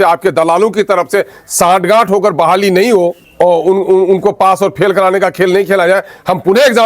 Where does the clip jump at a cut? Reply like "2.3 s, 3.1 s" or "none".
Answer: 3.2 s